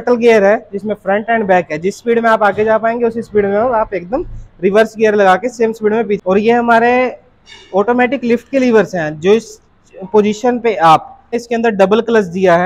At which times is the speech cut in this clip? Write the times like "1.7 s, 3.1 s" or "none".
6.2 s, 11.4 s